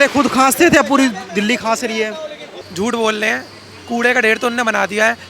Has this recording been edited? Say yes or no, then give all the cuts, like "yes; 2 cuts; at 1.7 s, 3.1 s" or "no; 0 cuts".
yes; 1 cut; at 2.6 s